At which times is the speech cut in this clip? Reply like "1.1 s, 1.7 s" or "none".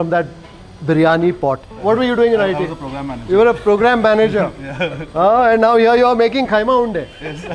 1.8 s